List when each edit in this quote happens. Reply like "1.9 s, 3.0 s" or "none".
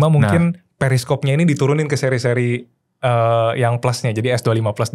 none